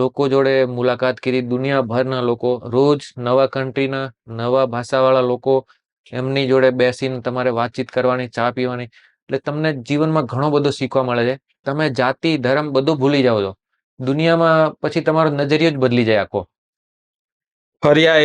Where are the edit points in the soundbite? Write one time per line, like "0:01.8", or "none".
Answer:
none